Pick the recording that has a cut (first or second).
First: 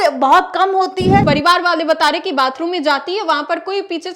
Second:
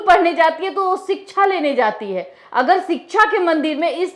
first